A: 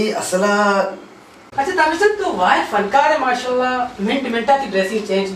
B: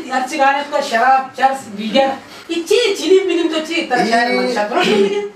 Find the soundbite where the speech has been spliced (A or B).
A